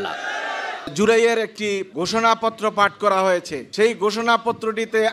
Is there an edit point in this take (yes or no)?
yes